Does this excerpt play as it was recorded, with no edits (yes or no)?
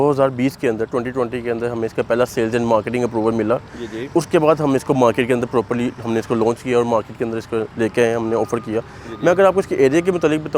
yes